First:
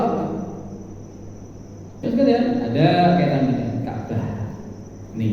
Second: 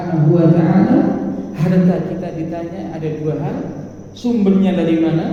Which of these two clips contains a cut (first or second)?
first